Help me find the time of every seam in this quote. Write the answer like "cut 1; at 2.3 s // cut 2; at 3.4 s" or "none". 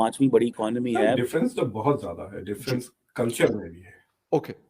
cut 1; at 1.2 s